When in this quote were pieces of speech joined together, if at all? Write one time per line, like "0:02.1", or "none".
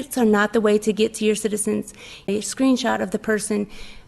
0:02.3